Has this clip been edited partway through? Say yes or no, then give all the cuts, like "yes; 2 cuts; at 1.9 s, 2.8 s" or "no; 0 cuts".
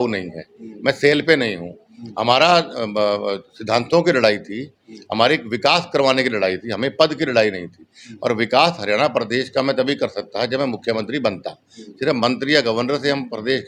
no; 0 cuts